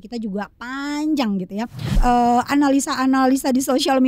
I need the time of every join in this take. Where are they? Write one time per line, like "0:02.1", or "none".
0:02.0